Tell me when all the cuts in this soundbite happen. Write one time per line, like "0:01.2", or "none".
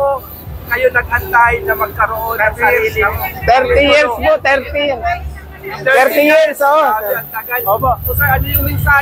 none